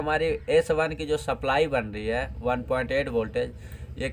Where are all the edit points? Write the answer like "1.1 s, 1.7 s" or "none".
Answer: none